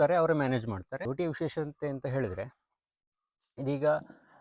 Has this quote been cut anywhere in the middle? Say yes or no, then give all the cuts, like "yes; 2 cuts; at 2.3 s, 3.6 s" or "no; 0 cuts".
yes; 1 cut; at 0.9 s